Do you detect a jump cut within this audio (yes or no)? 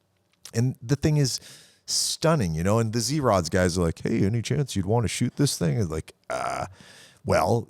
no